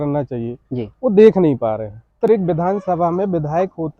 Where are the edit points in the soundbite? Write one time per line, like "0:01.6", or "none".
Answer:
0:02.2